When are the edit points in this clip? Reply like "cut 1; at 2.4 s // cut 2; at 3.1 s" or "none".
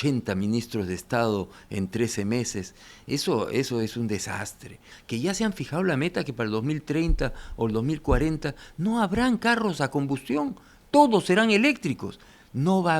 cut 1; at 4.9 s